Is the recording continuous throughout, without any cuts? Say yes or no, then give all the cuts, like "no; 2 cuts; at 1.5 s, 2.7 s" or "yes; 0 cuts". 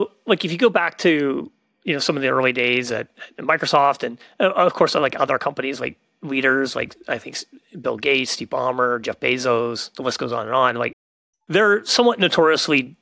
yes; 0 cuts